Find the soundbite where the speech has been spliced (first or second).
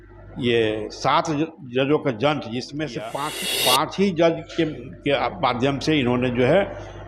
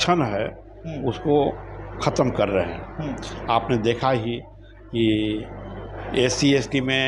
first